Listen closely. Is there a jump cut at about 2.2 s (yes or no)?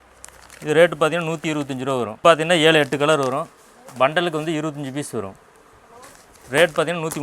yes